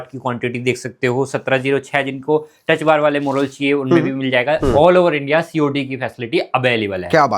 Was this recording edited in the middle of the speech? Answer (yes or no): yes